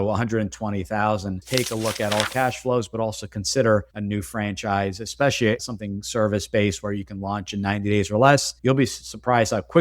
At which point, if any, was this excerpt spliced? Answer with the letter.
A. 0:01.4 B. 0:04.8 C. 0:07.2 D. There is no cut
A